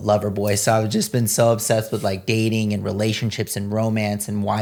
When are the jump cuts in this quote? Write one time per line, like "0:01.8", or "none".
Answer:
none